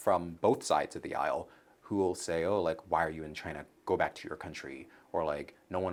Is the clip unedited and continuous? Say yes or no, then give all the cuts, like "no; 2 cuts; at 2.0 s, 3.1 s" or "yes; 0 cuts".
yes; 0 cuts